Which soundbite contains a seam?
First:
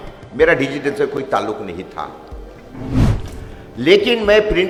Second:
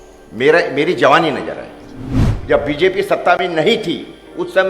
second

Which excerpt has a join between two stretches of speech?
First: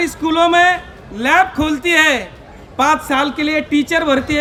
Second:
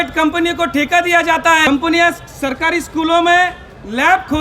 second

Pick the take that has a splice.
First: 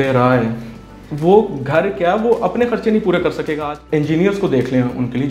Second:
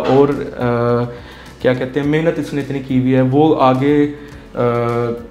first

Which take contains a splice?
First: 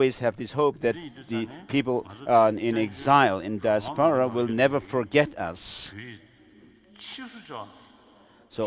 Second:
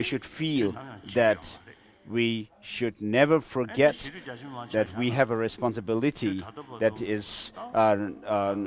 first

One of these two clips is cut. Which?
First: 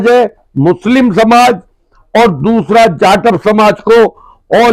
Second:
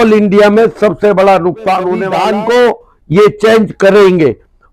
second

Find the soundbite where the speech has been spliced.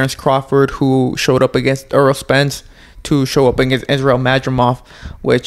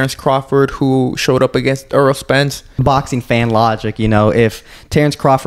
second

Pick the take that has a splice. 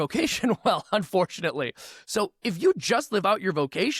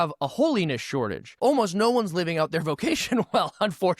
second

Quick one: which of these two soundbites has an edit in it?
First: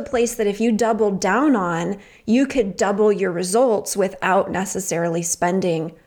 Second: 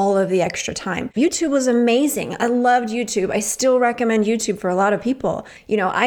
second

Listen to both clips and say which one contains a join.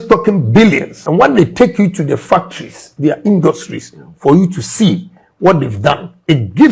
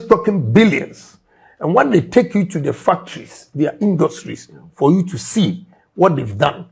first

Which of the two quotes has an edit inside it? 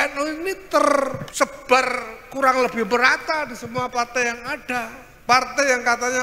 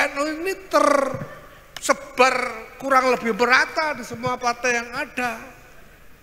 first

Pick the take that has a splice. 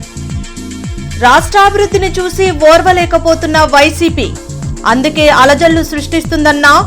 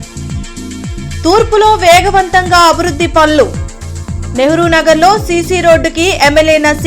first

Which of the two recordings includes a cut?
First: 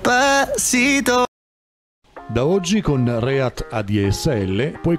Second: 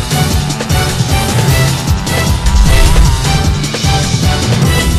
first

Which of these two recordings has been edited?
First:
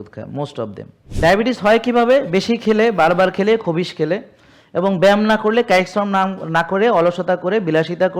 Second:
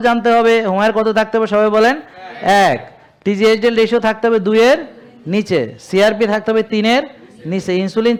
first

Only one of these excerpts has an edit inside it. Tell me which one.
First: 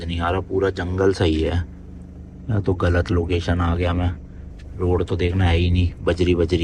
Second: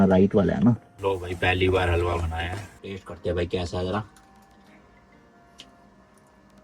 second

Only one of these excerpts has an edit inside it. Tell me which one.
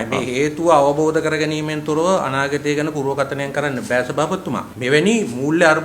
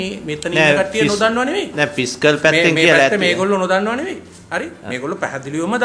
first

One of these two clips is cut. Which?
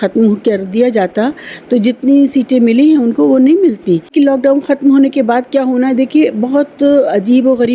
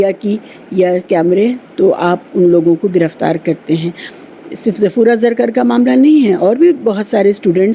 first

